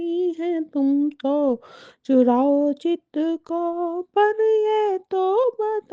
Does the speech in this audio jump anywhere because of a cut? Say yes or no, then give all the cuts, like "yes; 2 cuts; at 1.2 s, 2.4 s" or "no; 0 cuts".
yes; 1 cut; at 3.7 s